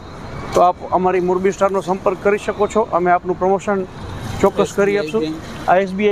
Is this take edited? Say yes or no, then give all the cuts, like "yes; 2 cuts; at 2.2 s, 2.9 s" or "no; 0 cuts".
no; 0 cuts